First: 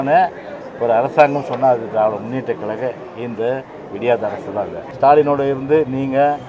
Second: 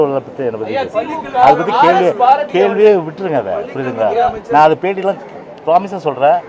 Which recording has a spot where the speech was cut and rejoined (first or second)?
first